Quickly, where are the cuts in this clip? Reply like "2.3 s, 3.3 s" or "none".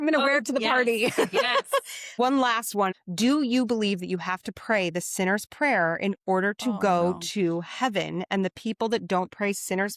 2.9 s